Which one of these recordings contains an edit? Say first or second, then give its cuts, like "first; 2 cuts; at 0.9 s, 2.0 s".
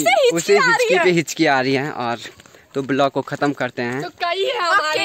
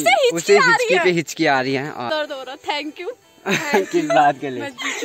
second; 1 cut; at 2.1 s